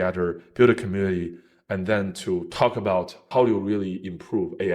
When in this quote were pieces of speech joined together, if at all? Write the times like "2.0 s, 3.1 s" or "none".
3.2 s